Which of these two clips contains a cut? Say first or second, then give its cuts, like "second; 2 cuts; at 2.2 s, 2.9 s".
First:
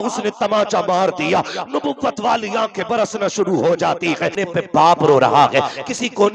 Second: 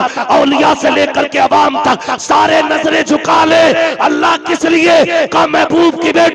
first; 1 cut; at 4.4 s